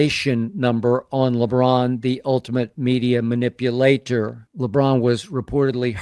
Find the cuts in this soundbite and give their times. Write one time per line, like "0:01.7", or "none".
0:04.4